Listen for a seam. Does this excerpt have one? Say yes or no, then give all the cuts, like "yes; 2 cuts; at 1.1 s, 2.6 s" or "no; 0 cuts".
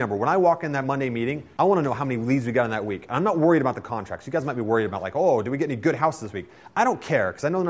yes; 1 cut; at 1.4 s